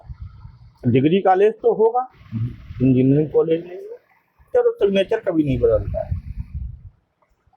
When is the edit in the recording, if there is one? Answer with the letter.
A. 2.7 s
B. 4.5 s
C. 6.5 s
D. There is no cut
B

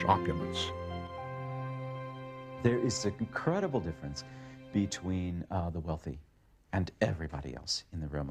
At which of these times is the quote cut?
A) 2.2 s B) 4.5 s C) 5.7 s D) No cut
C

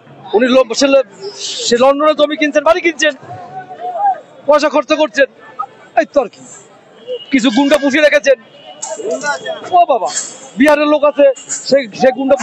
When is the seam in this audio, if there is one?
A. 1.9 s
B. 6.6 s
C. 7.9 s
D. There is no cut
D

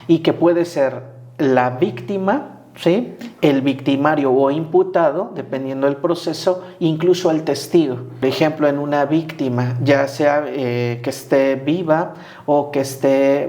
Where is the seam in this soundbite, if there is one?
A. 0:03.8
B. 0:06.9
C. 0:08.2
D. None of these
C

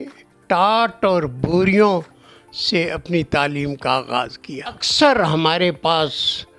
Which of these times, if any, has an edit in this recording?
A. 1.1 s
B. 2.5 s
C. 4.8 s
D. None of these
C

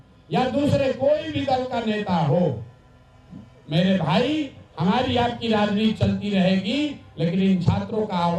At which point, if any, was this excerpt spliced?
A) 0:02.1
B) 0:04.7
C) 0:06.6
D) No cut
D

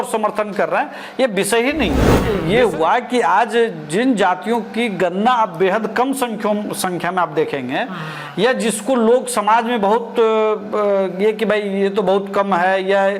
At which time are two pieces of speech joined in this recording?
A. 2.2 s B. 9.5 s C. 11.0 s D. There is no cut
A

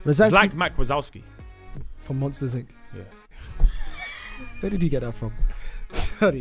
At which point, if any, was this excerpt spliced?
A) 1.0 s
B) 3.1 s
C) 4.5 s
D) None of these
D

